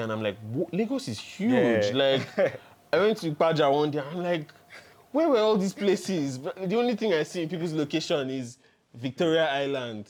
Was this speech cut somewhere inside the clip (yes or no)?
no